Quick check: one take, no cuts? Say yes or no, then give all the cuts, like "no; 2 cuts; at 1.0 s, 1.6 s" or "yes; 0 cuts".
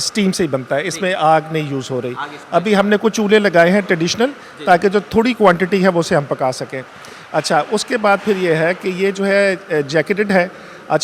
yes; 0 cuts